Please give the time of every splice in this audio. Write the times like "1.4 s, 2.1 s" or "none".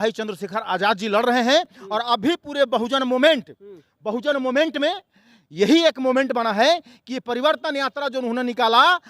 none